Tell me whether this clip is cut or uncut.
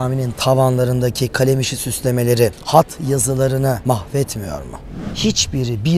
cut